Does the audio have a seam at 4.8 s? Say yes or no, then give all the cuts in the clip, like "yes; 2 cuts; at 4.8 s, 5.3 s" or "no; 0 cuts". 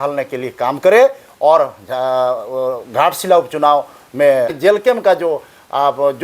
yes; 1 cut; at 4.8 s